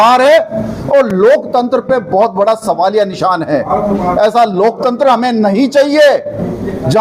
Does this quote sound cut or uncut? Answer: uncut